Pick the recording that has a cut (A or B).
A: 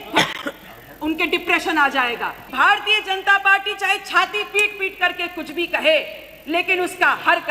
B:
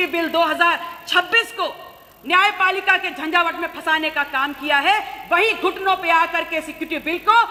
A